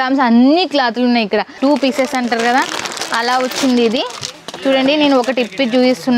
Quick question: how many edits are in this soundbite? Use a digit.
1